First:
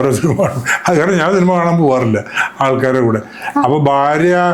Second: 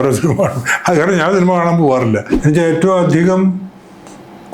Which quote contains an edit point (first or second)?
second